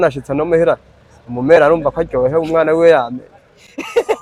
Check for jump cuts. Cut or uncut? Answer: uncut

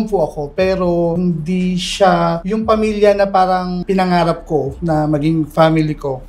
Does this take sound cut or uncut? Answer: cut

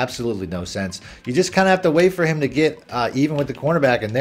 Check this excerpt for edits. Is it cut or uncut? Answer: uncut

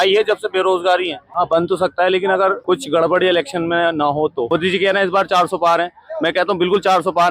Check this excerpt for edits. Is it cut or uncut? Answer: cut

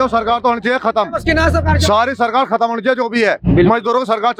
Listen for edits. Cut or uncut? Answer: uncut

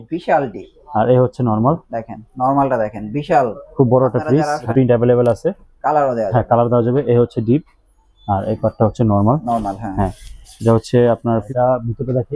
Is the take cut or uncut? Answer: cut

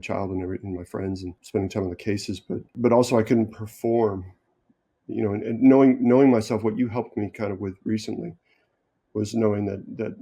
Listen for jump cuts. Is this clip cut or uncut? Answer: cut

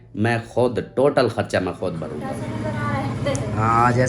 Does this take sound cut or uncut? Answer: cut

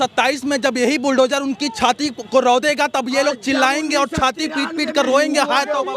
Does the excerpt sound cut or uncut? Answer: uncut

